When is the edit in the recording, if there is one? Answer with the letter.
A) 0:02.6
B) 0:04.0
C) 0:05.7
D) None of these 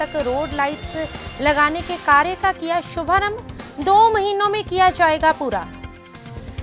D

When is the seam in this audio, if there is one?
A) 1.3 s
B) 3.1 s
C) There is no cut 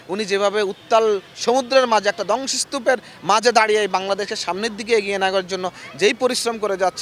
C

